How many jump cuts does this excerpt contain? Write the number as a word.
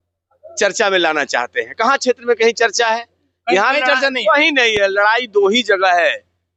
zero